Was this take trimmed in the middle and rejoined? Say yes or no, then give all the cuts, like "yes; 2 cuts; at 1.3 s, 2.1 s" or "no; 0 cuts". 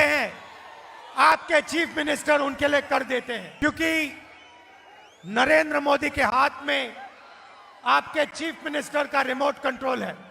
no; 0 cuts